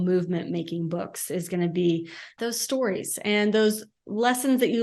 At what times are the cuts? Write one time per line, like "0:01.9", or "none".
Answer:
0:02.3